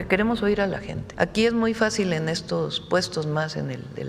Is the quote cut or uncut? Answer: cut